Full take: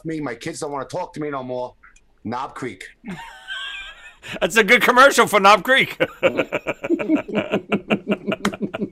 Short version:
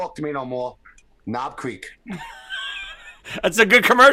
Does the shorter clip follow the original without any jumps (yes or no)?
yes